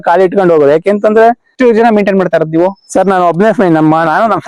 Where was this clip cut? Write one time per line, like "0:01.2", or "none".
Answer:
0:01.5